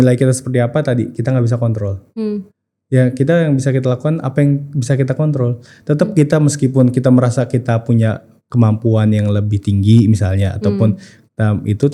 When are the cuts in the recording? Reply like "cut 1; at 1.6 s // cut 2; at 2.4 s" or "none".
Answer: none